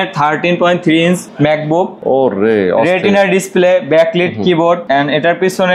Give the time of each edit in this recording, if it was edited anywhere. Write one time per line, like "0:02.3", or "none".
0:01.8
0:04.8